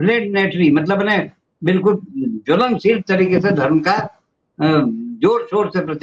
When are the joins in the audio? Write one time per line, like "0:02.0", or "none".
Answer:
none